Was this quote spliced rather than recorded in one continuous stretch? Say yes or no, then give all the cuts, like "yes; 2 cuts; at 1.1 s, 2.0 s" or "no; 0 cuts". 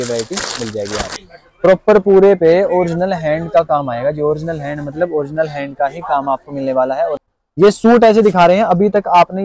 yes; 2 cuts; at 1.2 s, 7.2 s